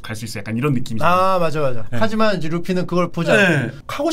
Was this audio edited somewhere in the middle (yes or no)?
no